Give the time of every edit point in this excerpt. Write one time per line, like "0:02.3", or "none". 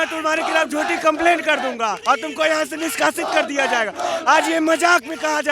0:02.0

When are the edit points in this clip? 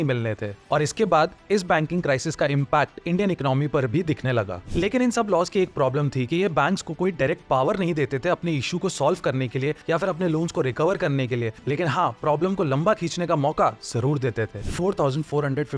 0:04.6
0:14.6

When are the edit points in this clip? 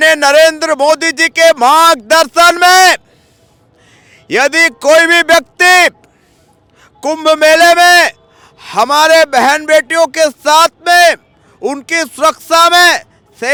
none

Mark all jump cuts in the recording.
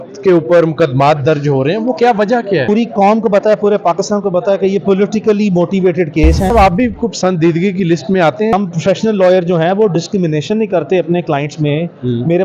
0:02.6
0:06.5
0:08.5

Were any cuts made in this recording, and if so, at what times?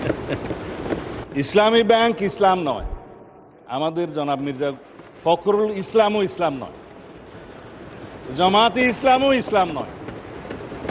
0:01.2

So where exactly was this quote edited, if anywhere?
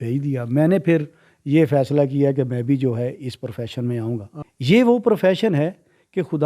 0:04.3

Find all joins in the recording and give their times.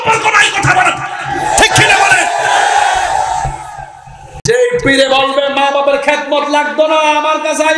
0:04.4

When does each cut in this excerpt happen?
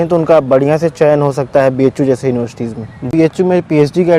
0:03.1

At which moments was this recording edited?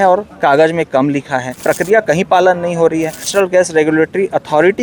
0:01.5
0:03.3

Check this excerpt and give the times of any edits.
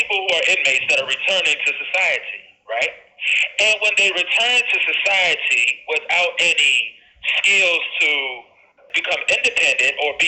0:08.8

